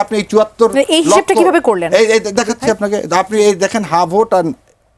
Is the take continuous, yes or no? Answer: yes